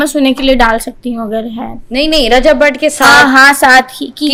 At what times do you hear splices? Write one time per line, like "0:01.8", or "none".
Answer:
none